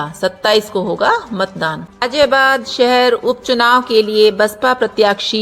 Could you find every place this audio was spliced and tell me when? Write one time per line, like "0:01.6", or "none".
0:01.9